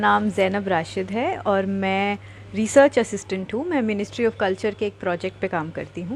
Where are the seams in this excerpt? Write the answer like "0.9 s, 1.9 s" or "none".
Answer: none